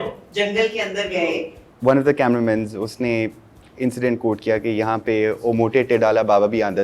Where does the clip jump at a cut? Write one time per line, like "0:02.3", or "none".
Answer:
0:01.6